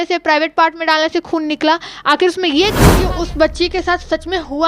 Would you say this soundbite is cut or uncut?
cut